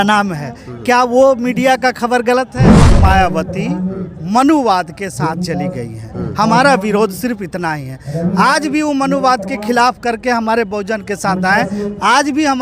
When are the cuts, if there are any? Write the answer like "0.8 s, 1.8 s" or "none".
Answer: 2.7 s